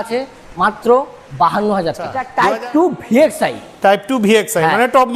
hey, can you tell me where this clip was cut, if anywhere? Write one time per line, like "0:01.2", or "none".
0:02.2

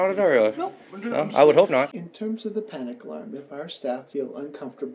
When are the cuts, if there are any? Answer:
0:01.9

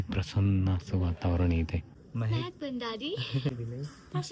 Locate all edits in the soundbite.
0:02.0
0:03.5

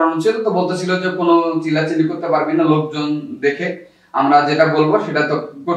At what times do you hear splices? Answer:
none

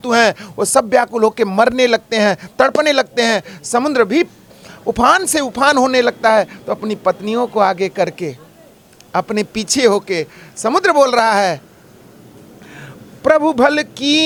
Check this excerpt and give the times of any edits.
none

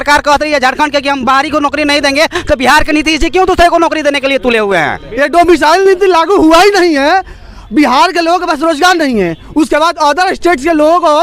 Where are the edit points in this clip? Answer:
none

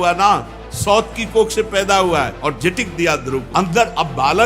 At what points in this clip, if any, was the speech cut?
0:02.3
0:03.5

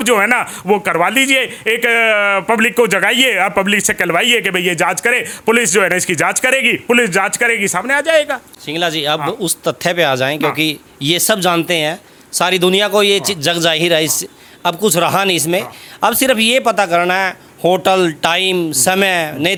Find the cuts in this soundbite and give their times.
none

